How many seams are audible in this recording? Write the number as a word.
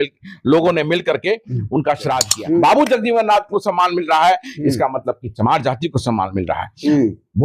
one